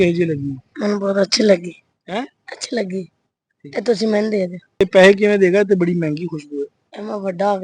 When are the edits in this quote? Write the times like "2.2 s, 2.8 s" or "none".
4.8 s